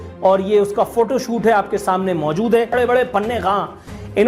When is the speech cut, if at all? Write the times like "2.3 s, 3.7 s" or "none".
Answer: 2.7 s